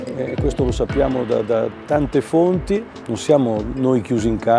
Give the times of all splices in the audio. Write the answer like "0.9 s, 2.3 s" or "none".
3.0 s